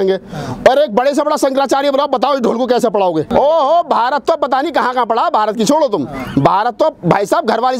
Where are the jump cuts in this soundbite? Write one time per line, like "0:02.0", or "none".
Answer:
0:03.3